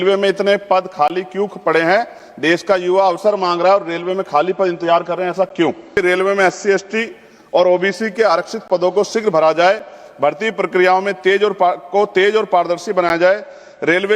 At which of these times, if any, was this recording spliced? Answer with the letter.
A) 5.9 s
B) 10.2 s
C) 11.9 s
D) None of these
A